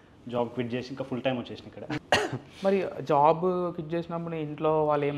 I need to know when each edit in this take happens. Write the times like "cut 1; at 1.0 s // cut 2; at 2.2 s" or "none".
cut 1; at 2.0 s